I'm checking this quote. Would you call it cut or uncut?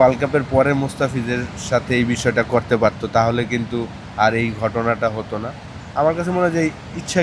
uncut